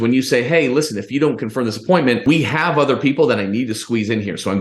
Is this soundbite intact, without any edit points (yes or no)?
no